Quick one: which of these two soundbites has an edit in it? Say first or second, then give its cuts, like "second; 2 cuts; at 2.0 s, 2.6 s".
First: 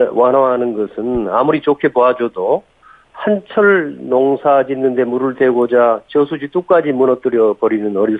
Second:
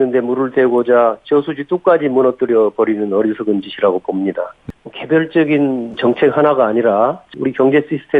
second; 3 cuts; at 4.5 s, 6.0 s, 7.3 s